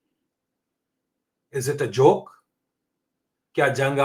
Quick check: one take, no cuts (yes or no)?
yes